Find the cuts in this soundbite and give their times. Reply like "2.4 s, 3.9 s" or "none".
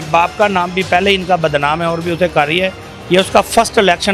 none